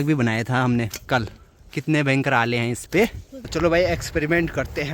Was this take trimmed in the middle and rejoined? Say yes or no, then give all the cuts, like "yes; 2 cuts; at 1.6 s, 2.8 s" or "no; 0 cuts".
yes; 2 cuts; at 1.4 s, 3.4 s